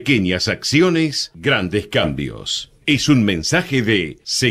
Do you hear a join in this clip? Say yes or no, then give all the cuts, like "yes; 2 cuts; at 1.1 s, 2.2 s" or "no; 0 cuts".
no; 0 cuts